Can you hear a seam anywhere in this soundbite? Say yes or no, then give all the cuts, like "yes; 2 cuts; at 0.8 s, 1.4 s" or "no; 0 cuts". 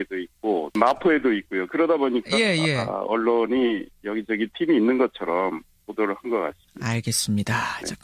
no; 0 cuts